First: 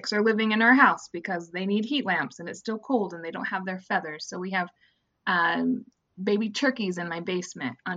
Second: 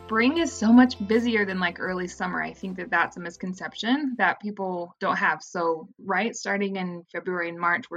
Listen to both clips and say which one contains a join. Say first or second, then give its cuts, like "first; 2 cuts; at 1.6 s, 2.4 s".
second; 1 cut; at 1.0 s